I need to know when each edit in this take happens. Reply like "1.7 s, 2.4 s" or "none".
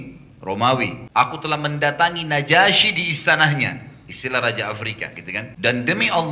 1.0 s, 5.5 s